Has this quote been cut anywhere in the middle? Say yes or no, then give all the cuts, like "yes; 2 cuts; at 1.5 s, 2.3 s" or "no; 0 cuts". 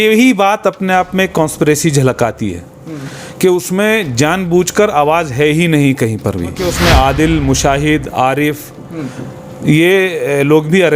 yes; 1 cut; at 6.7 s